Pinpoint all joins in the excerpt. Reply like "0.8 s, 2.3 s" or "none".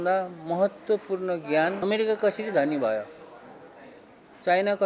1.8 s